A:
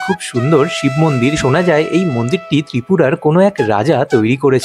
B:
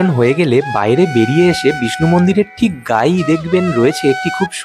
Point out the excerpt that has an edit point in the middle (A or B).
A